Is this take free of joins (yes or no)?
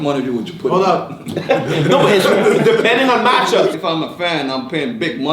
no